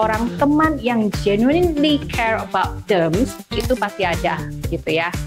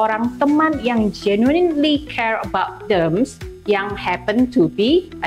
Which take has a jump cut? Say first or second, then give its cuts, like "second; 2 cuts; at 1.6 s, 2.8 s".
first; 1 cut; at 3.5 s